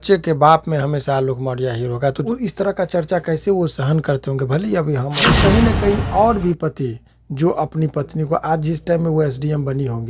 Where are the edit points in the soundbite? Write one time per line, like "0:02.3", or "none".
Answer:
0:02.2
0:05.3